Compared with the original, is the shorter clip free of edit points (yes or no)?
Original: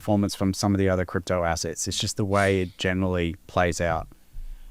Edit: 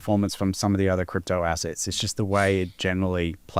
yes